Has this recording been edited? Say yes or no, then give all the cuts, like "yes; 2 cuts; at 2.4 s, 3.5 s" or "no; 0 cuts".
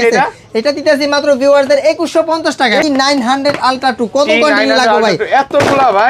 yes; 1 cut; at 2.8 s